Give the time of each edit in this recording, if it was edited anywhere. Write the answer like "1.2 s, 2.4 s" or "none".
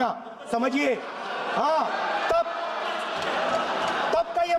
none